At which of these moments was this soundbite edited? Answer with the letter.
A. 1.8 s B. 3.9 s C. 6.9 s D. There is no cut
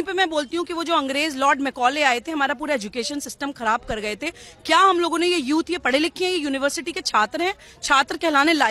D